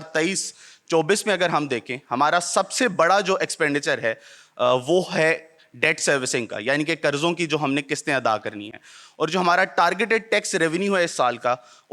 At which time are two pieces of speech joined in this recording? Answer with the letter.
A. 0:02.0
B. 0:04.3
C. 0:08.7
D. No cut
D